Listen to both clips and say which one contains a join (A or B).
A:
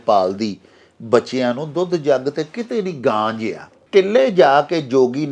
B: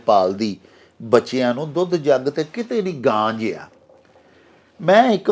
A